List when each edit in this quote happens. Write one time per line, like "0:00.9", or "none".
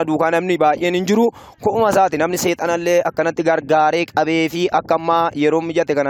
none